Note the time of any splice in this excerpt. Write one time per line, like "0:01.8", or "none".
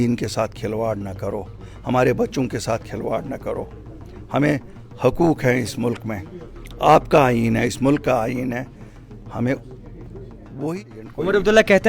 0:10.6

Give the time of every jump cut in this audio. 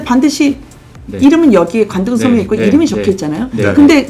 none

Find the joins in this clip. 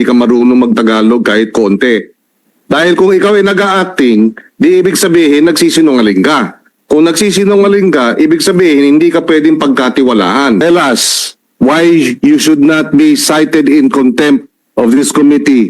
0:10.6

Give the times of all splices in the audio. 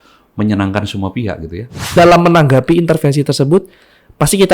0:01.8

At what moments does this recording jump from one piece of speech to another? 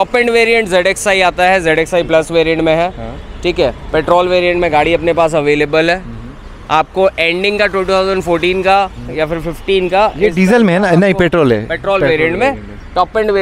none

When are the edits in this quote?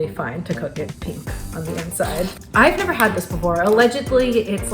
0:01.0
0:02.4

